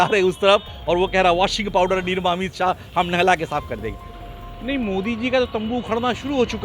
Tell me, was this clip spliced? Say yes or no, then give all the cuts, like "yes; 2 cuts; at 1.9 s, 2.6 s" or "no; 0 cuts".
yes; 1 cut; at 4.0 s